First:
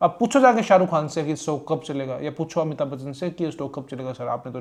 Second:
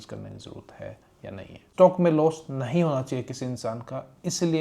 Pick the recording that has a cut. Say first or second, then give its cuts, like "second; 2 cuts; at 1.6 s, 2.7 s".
second; 1 cut; at 1.7 s